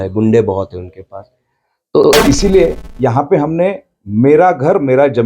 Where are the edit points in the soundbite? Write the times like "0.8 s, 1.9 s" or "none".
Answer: 2.0 s